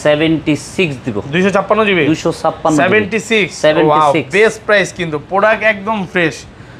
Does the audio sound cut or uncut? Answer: uncut